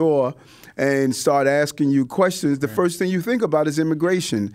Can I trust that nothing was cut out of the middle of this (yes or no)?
yes